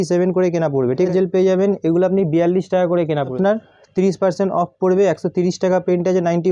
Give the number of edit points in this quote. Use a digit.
2